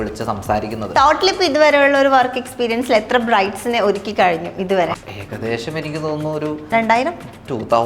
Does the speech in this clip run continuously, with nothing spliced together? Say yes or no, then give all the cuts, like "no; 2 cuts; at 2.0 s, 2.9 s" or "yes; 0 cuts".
no; 2 cuts; at 1.0 s, 6.6 s